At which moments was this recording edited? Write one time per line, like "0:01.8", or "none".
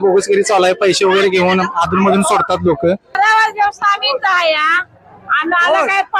0:03.1